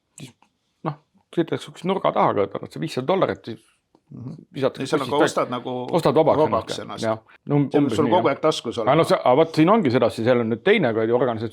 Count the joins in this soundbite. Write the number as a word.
one